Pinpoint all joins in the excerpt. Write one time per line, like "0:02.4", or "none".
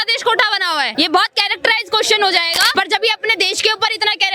0:00.9
0:02.7

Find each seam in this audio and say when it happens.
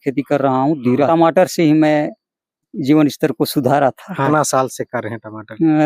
0:01.1
0:02.7
0:04.3

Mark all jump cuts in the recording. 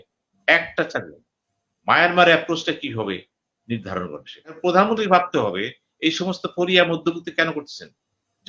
0:04.6

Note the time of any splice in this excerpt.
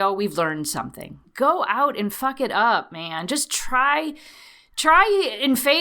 0:01.2

